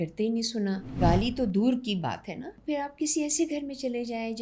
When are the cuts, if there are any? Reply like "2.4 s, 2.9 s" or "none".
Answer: 0.9 s, 2.5 s